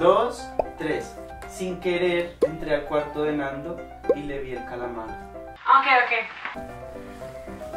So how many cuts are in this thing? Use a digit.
1